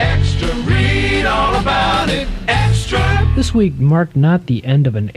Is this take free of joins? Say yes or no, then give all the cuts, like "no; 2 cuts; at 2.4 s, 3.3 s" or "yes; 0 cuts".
no; 1 cut; at 3.6 s